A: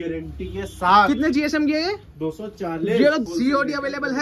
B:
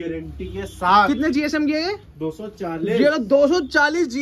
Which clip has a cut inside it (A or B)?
A